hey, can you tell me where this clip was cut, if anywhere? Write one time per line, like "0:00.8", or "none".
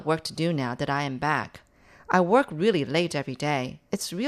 0:01.8